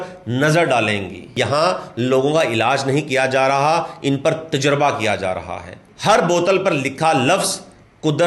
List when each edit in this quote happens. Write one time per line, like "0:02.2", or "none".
0:01.3
0:05.8